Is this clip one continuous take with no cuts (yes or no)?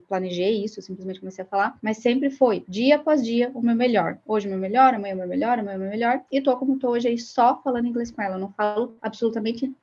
yes